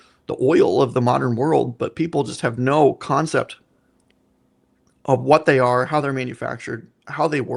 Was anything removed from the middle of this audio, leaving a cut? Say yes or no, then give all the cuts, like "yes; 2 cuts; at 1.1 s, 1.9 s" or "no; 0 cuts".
no; 0 cuts